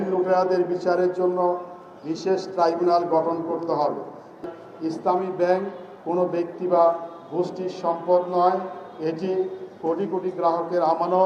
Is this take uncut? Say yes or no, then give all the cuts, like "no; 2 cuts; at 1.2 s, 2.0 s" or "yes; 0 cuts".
no; 1 cut; at 4.4 s